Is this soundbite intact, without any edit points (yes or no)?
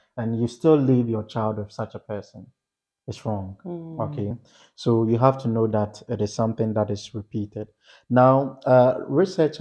yes